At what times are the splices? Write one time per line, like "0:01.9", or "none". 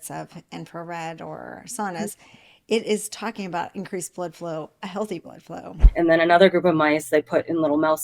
0:05.8